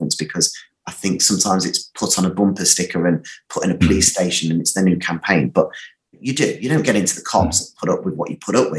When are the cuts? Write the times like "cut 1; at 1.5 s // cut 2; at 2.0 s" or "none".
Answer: cut 1; at 6.2 s